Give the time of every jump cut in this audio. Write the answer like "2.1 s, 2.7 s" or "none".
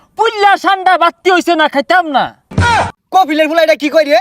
2.6 s